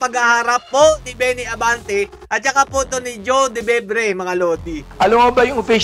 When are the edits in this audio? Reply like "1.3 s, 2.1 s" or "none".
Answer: 4.9 s